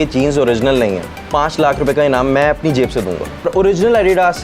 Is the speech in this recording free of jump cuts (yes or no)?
no